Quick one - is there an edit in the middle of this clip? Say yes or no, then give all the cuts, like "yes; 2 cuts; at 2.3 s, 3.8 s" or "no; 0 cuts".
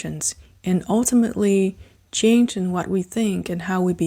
no; 0 cuts